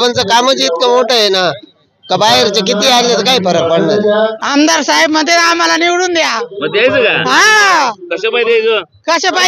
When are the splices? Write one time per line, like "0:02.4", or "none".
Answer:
0:04.4